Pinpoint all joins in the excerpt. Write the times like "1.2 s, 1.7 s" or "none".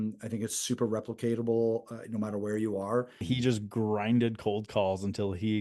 3.2 s